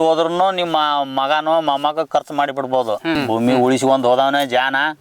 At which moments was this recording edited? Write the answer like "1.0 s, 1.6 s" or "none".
3.2 s